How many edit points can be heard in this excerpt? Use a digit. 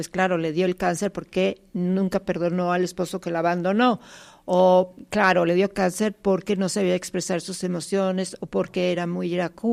0